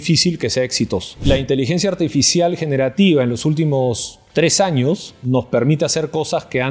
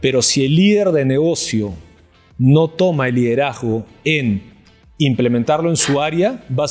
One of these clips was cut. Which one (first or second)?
first